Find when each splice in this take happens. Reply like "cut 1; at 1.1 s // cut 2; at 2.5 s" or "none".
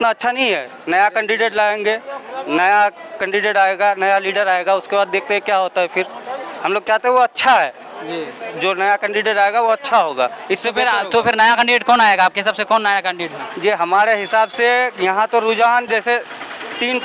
none